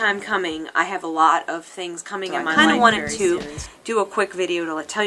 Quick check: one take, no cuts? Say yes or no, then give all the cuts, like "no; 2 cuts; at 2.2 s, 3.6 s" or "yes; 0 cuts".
no; 1 cut; at 2.4 s